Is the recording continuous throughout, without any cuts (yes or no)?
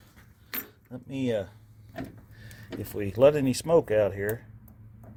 yes